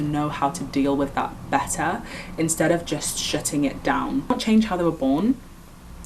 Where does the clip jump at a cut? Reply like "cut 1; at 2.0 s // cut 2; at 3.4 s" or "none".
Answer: cut 1; at 4.3 s

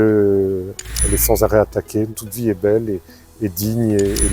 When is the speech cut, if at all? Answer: cut 1; at 2.2 s

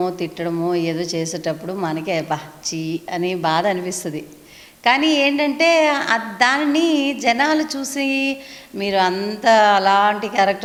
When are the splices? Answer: none

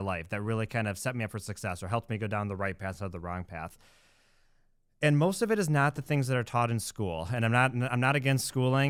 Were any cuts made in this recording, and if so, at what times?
none

